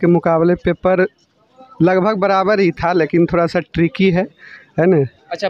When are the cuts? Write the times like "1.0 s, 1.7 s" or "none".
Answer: none

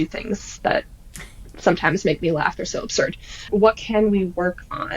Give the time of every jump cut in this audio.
3.5 s

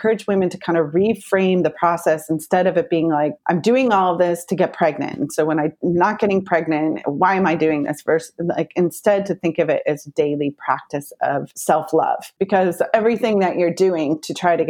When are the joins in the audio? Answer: 3.3 s, 11.5 s, 12.3 s

